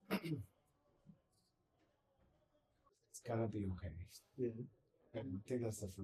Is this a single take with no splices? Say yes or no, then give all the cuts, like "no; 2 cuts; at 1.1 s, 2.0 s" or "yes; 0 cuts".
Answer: no; 1 cut; at 3.1 s